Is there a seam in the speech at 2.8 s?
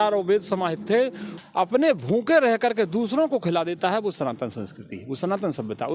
no; 1 cut; at 1.4 s

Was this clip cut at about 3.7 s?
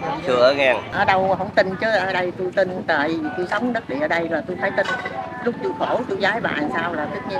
no; 1 cut; at 0.9 s

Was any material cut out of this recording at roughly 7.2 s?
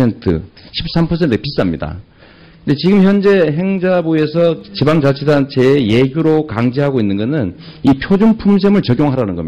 no; 1 cut; at 5.5 s

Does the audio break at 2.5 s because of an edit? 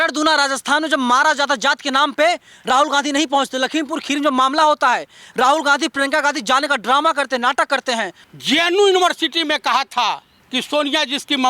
no; 2 cuts; at 8.2 s, 10.3 s

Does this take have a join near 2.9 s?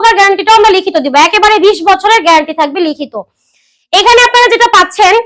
no; 0 cuts

